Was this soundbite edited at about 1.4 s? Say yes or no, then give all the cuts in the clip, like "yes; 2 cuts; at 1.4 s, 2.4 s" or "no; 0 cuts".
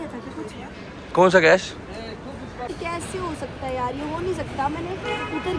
no; 1 cut; at 2.7 s